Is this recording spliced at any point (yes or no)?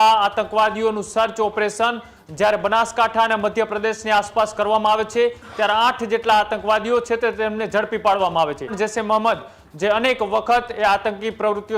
yes